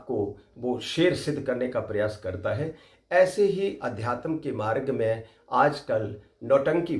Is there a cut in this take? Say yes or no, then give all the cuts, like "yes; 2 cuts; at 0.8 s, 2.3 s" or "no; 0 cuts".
no; 0 cuts